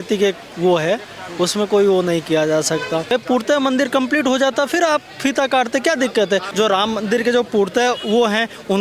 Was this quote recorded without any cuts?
no; 2 cuts; at 3.1 s, 6.5 s

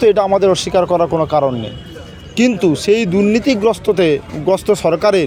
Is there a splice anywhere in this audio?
no; 0 cuts

